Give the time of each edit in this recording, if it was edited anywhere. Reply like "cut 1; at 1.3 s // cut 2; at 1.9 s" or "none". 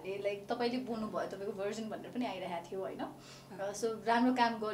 none